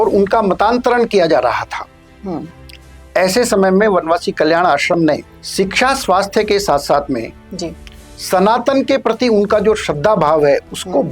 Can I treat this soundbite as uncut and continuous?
no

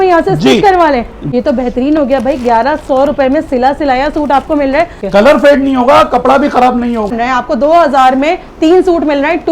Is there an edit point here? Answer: yes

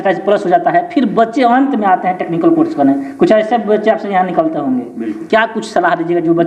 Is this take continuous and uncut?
yes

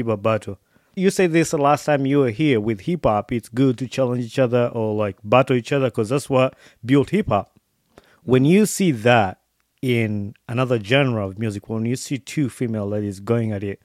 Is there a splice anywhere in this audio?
yes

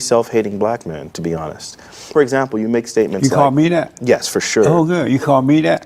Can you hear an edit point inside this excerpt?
yes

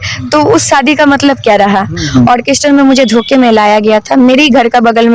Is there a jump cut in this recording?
yes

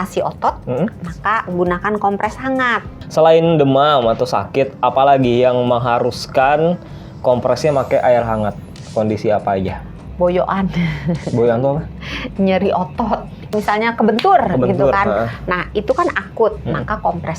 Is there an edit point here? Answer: yes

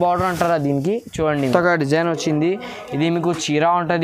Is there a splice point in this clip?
yes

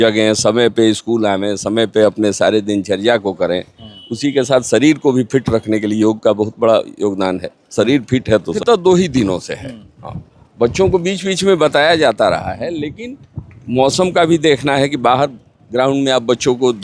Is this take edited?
yes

